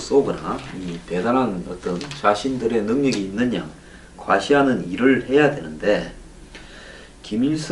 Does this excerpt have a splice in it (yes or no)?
yes